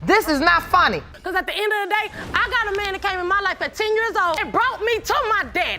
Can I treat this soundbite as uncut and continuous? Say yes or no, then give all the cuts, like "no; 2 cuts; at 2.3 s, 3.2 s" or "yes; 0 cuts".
no; 1 cut; at 1.1 s